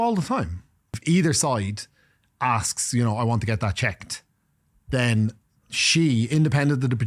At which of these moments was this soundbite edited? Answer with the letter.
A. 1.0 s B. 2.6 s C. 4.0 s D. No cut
A